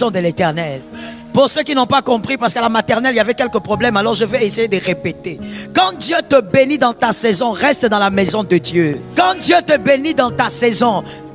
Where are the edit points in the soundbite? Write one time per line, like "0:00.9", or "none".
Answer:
0:09.0